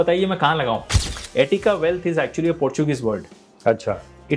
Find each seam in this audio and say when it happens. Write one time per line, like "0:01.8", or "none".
0:00.9